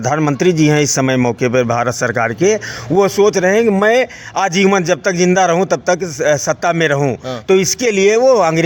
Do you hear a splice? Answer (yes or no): no